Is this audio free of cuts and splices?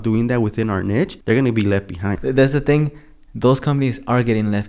no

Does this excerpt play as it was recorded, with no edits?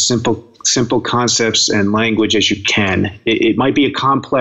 yes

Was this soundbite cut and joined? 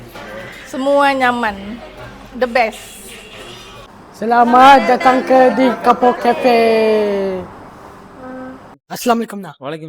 no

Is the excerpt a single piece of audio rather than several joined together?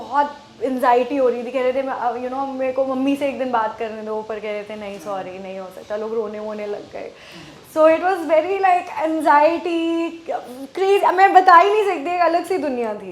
yes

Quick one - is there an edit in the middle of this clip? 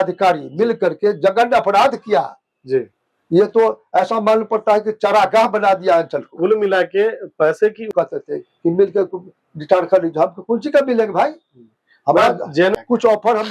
yes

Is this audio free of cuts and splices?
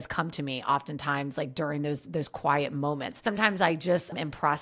yes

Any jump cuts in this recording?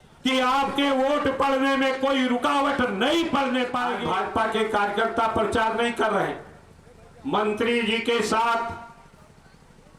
yes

